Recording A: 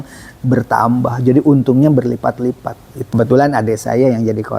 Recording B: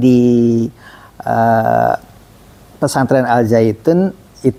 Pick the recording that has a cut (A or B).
A